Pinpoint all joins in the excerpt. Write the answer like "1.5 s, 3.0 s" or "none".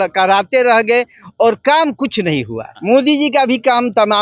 2.8 s